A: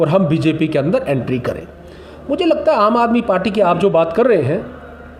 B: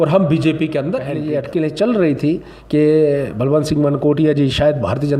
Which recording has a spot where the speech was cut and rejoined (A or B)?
B